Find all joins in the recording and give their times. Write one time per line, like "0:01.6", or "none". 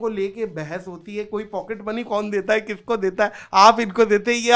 none

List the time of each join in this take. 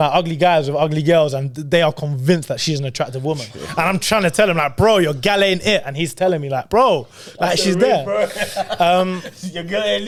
none

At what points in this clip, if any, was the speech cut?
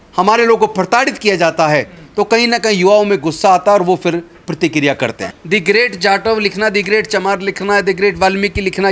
0:05.3

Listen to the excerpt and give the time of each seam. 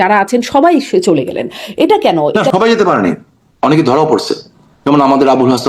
0:02.3

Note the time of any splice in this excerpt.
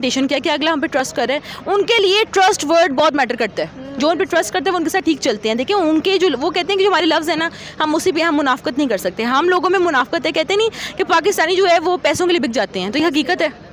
none

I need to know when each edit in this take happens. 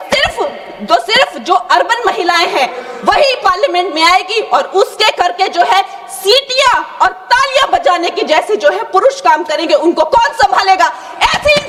none

